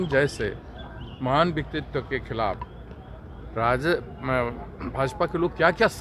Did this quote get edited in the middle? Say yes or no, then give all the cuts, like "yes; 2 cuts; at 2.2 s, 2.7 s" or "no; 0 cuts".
no; 0 cuts